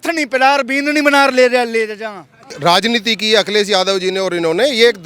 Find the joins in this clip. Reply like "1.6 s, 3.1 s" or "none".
2.6 s